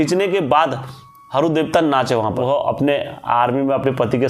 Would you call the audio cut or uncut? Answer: cut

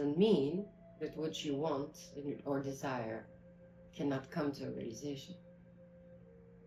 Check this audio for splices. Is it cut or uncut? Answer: uncut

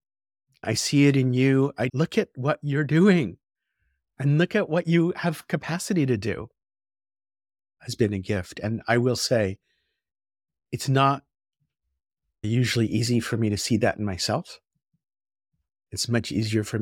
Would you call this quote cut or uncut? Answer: cut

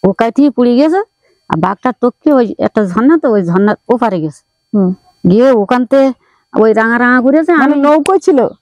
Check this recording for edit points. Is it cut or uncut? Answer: uncut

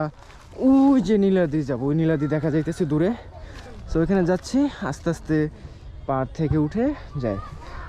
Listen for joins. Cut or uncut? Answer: uncut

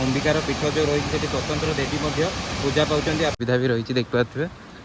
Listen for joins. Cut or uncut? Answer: cut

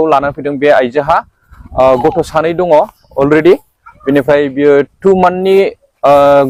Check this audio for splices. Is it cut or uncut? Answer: uncut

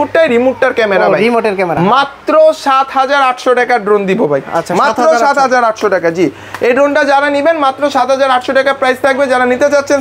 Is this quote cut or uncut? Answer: uncut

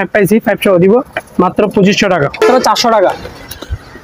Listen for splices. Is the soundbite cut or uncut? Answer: cut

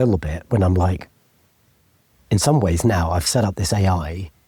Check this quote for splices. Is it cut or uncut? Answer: uncut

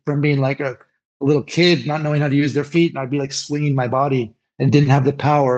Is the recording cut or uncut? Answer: cut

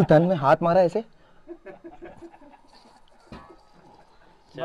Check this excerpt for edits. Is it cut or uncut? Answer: uncut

